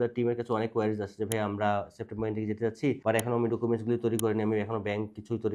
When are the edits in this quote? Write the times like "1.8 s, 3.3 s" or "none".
3.0 s